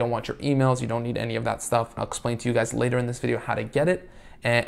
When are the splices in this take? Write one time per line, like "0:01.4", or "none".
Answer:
0:02.1